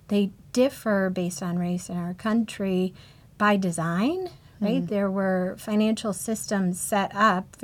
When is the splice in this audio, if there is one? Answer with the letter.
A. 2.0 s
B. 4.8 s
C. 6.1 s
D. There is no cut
B